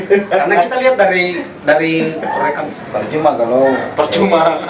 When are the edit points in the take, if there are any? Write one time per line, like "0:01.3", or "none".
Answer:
0:02.6